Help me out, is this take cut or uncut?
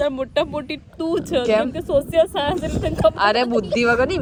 uncut